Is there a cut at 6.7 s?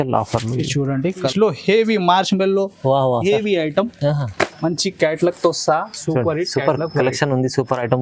no; 1 cut; at 1.2 s

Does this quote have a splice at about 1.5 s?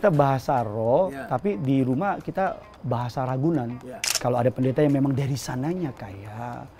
no; 1 cut; at 4.0 s

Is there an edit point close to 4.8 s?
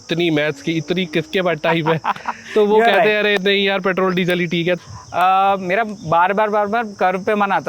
yes; 1 cut; at 4.8 s

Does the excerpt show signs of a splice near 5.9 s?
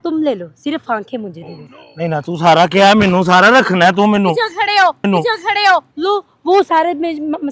yes; 1 cut; at 5.9 s

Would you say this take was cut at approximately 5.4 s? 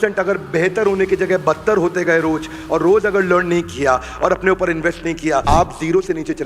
yes; 1 cut; at 5.4 s

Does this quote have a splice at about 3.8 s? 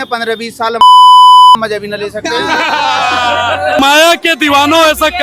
yes; 1 cut; at 3.8 s

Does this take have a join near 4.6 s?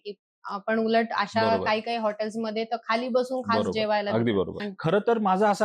yes; 1 cut; at 4.6 s

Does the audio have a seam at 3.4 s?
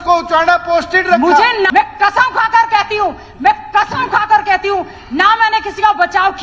no; 1 cut; at 1.7 s

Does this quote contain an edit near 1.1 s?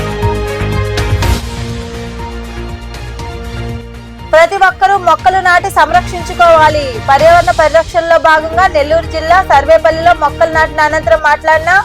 yes; 1 cut; at 1.1 s

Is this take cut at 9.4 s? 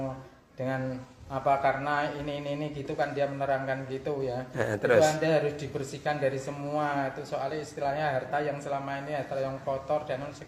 no; 0 cuts

